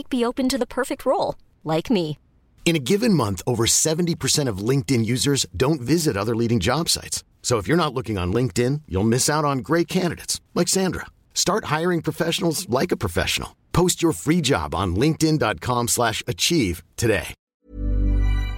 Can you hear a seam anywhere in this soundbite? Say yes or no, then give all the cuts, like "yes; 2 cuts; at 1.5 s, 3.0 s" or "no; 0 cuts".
yes; 1 cut; at 17.5 s